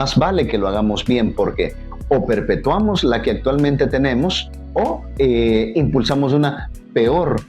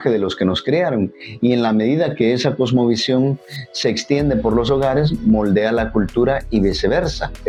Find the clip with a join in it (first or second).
first